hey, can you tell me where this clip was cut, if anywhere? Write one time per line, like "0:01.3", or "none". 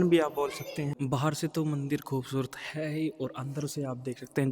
0:00.9